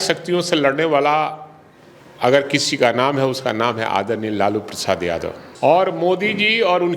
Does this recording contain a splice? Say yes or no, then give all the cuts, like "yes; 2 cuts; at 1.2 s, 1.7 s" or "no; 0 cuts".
no; 0 cuts